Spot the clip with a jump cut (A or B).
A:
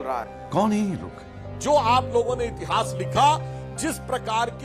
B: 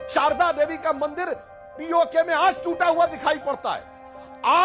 A